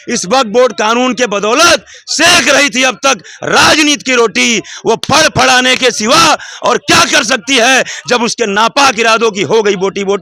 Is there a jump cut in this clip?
no; 0 cuts

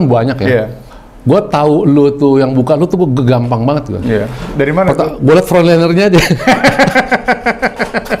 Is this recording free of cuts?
yes; 0 cuts

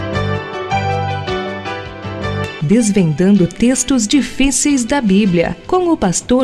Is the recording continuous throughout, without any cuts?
yes; 0 cuts

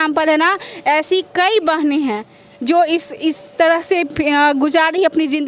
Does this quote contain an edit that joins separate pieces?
no; 0 cuts

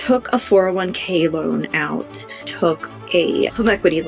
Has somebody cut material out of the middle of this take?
yes; 1 cut; at 2.5 s

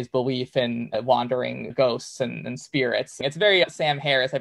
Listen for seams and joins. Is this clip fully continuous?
no; 1 cut; at 3.1 s

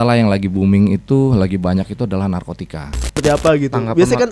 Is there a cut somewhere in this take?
yes; 1 cut; at 3.2 s

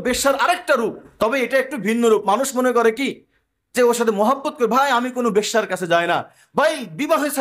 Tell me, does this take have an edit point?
no; 0 cuts

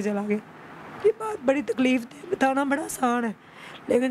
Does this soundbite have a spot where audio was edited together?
no; 0 cuts

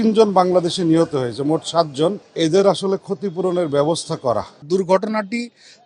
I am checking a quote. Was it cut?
yes; 2 cuts; at 2.2 s, 4.6 s

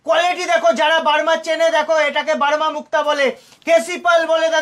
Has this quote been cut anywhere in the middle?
no; 0 cuts

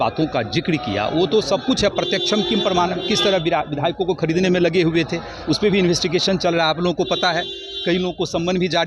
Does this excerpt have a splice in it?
no; 0 cuts

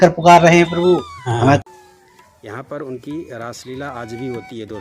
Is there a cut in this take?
yes; 1 cut; at 1.6 s

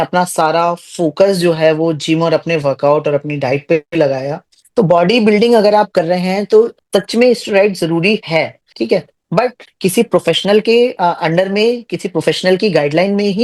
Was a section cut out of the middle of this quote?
yes; 4 cuts; at 4.5 s, 6.8 s, 8.6 s, 9.6 s

